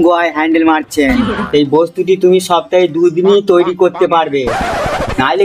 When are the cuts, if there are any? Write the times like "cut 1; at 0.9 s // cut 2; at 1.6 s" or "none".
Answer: cut 1; at 1.4 s

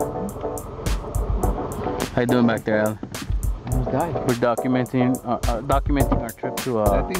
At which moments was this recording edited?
cut 1; at 1.4 s

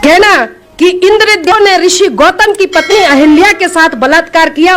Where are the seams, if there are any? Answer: cut 1; at 1.5 s

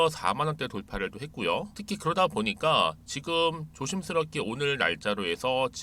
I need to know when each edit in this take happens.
cut 1; at 1.8 s

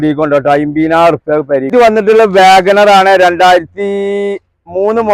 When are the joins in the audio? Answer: cut 1; at 1.7 s

